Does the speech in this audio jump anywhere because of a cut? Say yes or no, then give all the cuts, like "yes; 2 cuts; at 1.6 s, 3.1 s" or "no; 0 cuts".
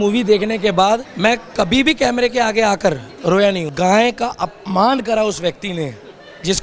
yes; 2 cuts; at 1.1 s, 3.7 s